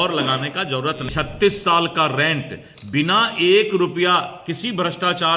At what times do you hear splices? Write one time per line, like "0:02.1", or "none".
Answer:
0:01.1